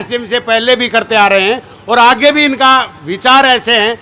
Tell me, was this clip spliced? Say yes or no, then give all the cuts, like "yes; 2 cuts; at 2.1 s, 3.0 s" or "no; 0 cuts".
no; 0 cuts